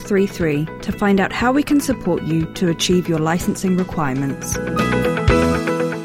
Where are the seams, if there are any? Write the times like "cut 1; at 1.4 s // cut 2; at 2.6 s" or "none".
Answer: cut 1; at 4.5 s